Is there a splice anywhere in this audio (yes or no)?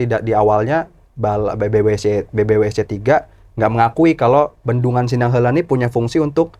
no